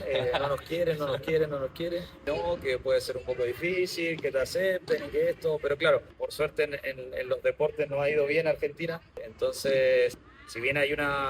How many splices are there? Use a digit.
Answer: 4